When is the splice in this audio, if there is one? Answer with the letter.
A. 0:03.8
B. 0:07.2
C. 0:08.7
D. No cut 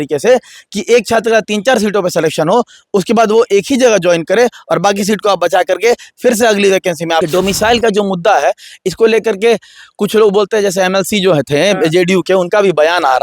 B